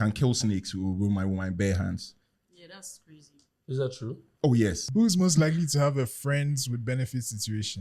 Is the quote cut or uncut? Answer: cut